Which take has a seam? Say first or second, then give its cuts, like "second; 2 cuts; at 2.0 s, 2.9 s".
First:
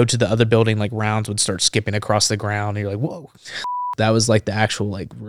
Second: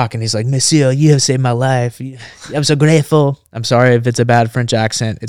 first; 1 cut; at 3.9 s